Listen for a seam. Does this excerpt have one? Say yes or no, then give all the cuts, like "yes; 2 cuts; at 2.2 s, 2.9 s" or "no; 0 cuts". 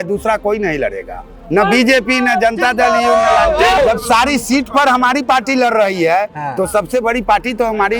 yes; 1 cut; at 3.8 s